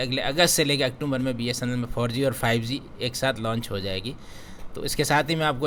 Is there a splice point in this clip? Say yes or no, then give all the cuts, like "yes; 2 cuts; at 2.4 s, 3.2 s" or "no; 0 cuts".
no; 0 cuts